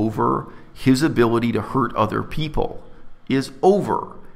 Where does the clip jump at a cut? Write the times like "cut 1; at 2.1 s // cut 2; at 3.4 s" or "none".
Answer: none